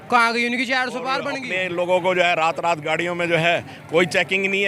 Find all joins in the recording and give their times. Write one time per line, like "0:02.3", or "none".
0:01.4